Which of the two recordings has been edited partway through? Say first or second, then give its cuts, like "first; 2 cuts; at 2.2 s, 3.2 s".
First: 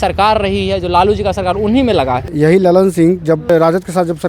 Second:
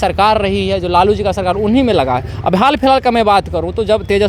first; 2 cuts; at 2.3 s, 3.5 s